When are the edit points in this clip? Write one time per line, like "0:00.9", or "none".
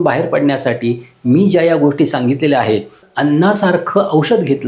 0:03.0